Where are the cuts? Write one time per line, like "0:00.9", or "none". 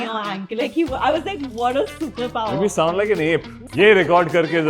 0:03.6